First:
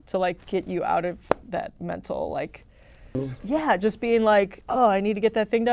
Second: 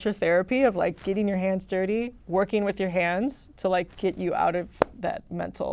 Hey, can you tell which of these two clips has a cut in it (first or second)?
first